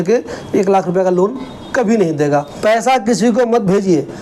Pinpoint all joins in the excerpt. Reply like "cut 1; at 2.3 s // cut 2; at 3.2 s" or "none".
cut 1; at 2.5 s